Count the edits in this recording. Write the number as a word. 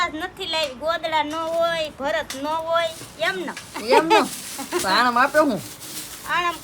zero